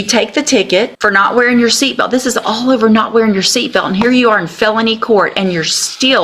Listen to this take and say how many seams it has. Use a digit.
1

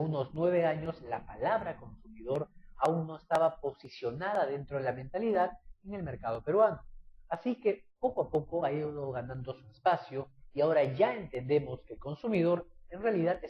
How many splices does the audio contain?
0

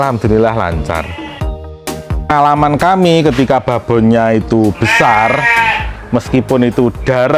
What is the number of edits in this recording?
1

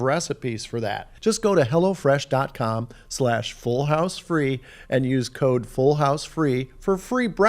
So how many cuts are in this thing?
1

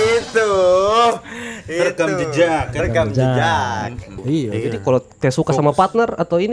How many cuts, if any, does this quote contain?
1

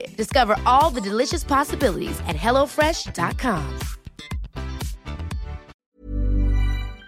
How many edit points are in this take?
1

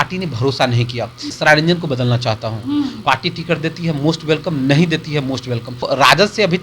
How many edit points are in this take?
3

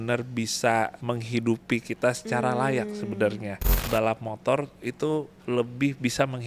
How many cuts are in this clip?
2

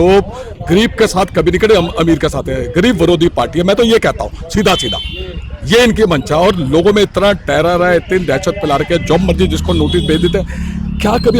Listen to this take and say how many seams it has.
0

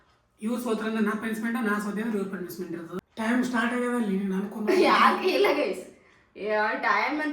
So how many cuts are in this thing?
1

